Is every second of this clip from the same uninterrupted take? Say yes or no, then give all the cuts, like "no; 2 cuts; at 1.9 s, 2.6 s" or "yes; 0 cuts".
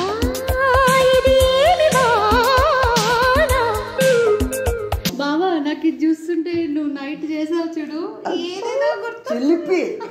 no; 1 cut; at 5.1 s